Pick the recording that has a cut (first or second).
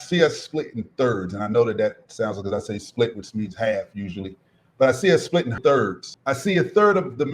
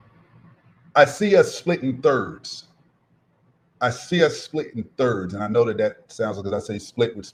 first